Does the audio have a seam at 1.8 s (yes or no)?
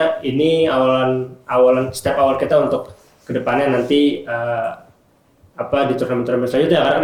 no